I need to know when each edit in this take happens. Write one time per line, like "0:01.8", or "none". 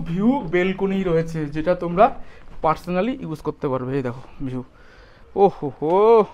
none